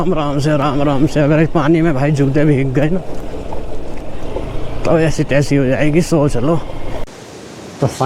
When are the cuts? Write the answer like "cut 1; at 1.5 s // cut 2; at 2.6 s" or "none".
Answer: cut 1; at 7.1 s

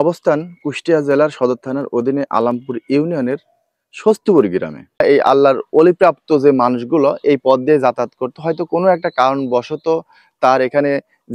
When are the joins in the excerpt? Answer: cut 1; at 5.0 s

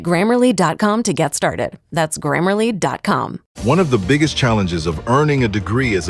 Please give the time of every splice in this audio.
cut 1; at 3.4 s

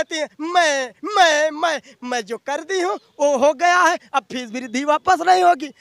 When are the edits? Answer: none

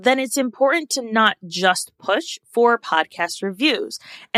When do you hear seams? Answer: none

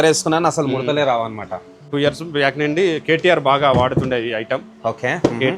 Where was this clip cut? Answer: cut 1; at 1.9 s

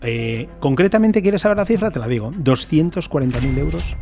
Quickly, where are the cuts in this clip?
none

